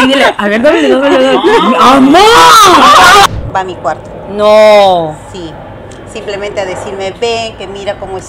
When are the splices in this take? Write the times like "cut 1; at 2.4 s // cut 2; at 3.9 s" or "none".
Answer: cut 1; at 3.3 s